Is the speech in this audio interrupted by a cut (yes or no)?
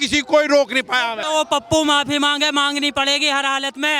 yes